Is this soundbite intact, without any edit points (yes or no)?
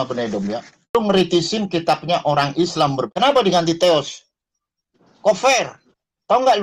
no